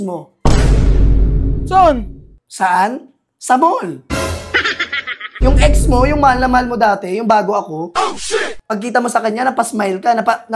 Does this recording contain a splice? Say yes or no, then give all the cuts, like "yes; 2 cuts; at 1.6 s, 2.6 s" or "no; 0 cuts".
yes; 2 cuts; at 5.3 s, 8.6 s